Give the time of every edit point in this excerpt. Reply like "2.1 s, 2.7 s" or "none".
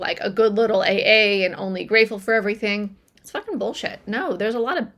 none